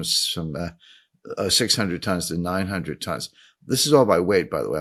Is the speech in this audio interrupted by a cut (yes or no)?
no